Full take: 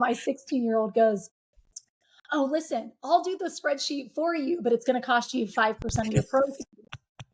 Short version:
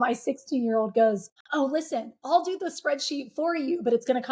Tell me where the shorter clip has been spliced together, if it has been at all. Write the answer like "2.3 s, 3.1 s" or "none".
1.3 s